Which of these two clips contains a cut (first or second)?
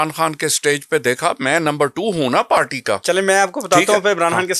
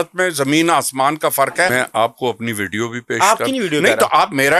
second